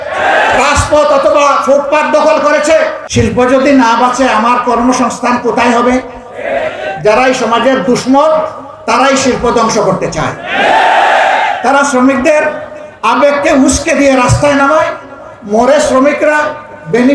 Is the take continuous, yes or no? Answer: no